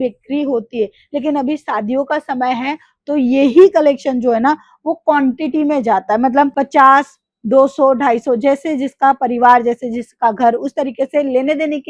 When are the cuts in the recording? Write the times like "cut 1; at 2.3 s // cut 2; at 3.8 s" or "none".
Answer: none